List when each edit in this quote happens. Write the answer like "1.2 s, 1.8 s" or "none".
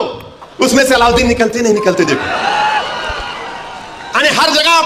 none